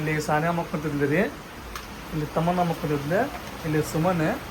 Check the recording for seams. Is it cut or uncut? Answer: uncut